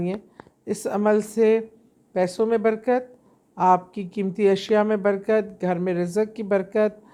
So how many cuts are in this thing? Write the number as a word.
zero